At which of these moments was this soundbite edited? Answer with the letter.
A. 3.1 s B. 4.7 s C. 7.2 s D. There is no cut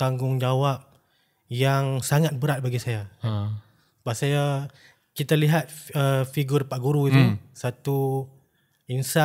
D